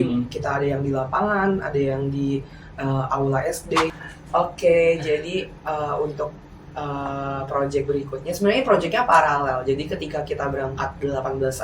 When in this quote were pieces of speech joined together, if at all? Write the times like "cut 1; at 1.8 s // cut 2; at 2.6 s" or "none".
cut 1; at 3.9 s